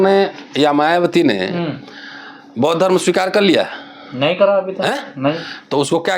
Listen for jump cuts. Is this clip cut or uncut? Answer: uncut